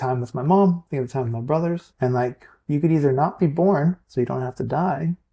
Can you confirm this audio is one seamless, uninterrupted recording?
no; 1 cut; at 1.9 s

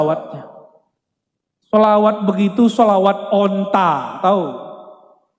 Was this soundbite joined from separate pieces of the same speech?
no; 0 cuts

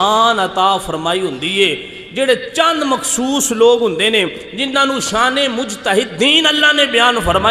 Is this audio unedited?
yes; 0 cuts

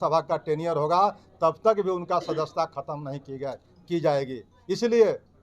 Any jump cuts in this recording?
no; 0 cuts

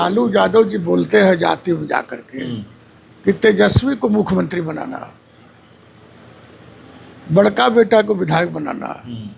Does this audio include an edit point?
no; 0 cuts

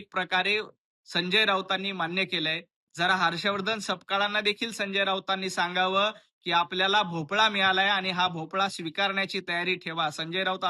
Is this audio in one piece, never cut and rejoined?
yes; 0 cuts

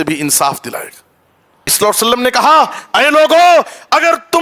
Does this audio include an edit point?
yes; 1 cut; at 1.7 s

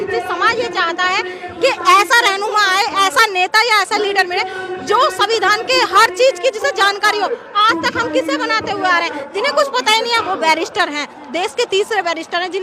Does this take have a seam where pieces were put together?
no; 0 cuts

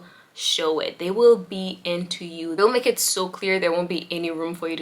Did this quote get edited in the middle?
no; 0 cuts

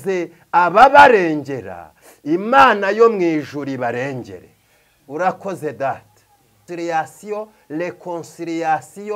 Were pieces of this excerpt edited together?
yes; 1 cut; at 6.6 s

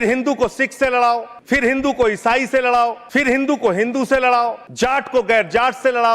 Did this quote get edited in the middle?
yes; 3 cuts; at 1.3 s, 3.0 s, 4.6 s

